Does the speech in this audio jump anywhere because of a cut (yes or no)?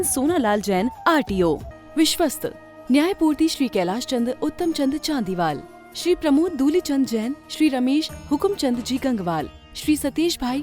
yes